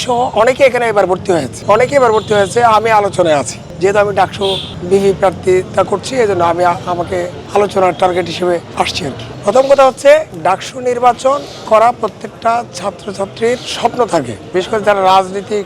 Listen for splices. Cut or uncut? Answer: uncut